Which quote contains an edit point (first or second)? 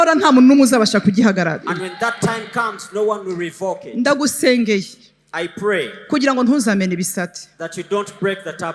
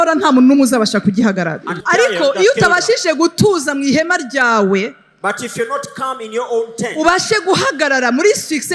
second